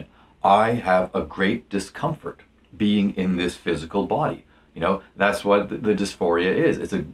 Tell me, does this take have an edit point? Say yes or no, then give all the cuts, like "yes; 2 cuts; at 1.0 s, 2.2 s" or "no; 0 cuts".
yes; 1 cut; at 3.9 s